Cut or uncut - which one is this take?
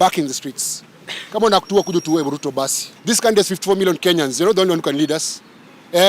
cut